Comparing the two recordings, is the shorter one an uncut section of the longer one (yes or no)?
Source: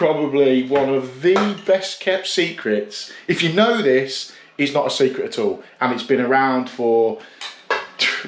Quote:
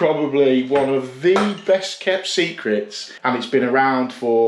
no